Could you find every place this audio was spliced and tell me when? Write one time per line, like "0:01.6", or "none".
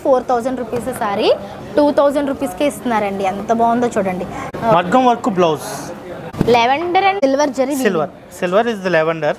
0:04.4
0:06.3
0:07.2